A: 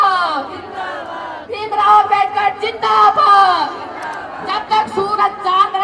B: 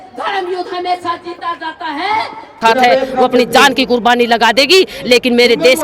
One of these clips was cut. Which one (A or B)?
B